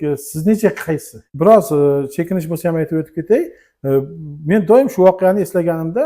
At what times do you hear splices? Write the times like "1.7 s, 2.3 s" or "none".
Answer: 1.2 s